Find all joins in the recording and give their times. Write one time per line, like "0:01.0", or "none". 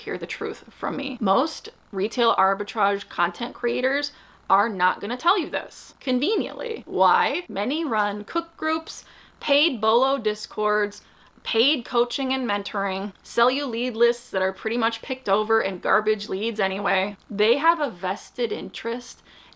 none